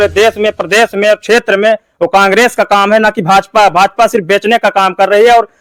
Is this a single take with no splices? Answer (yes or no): yes